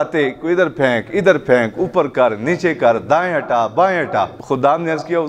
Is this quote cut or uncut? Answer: cut